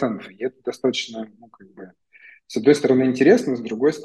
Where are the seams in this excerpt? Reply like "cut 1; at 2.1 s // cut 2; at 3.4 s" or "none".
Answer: none

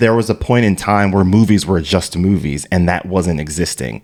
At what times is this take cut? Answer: none

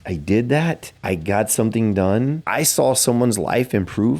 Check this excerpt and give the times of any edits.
cut 1; at 0.9 s // cut 2; at 2.4 s

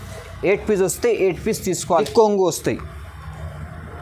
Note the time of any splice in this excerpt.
cut 1; at 2.0 s

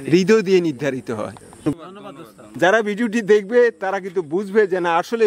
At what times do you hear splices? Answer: cut 1; at 1.8 s

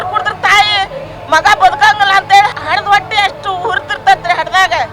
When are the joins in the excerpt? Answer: cut 1; at 2.5 s

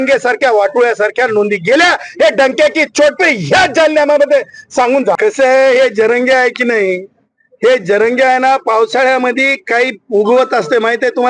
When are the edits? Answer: cut 1; at 5.2 s

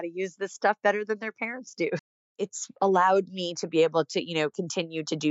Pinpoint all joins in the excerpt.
cut 1; at 2.1 s

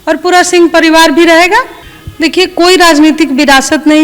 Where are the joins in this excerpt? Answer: cut 1; at 1.8 s

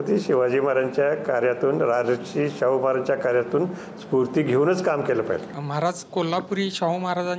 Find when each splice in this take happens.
none

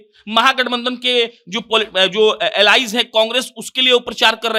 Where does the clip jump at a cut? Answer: none

